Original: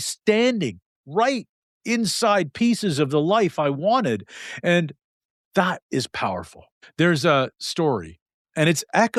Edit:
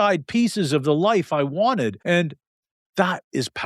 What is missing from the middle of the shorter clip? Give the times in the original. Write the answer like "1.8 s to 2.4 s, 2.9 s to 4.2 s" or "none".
4.2 s to 4.6 s